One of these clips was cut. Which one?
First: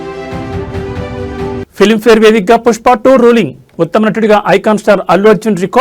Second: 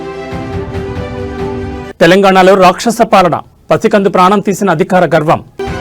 second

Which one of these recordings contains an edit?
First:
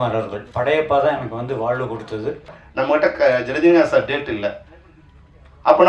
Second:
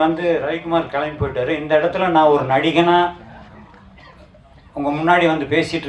first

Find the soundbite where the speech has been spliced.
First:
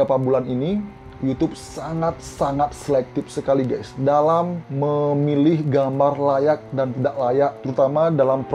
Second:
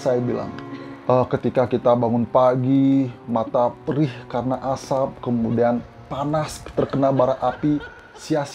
first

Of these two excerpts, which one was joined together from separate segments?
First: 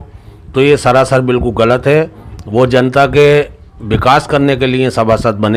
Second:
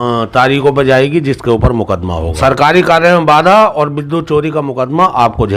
second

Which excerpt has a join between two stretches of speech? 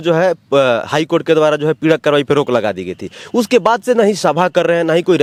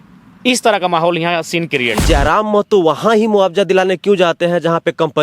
second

